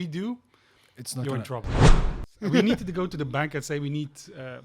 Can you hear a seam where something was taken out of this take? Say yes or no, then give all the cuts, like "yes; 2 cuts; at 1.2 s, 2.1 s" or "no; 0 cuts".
yes; 1 cut; at 2.0 s